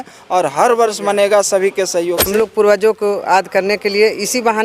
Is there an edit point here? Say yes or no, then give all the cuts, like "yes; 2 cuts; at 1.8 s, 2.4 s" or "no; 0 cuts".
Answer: yes; 1 cut; at 2.2 s